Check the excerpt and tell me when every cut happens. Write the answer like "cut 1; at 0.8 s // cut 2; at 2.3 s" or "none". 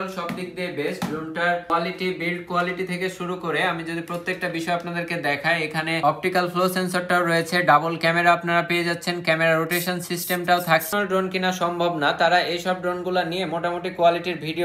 cut 1; at 1.7 s // cut 2; at 6.0 s // cut 3; at 10.9 s